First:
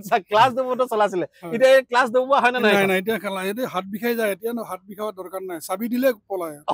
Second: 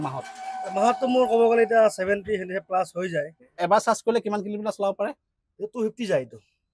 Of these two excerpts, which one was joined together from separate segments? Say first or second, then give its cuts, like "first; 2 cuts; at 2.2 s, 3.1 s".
second; 1 cut; at 3.4 s